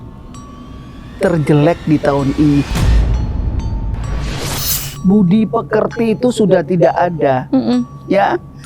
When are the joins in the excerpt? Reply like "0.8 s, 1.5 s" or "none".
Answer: 2.8 s, 4.9 s

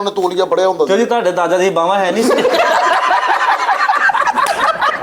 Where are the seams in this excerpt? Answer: none

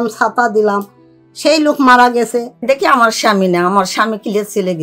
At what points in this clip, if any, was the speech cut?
2.5 s

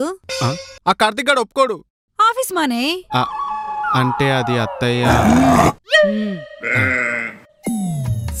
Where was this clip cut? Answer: none

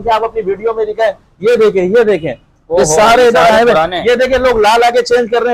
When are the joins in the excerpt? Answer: none

